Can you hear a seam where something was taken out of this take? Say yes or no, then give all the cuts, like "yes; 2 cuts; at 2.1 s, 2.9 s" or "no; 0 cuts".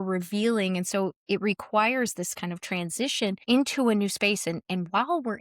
yes; 1 cut; at 3.4 s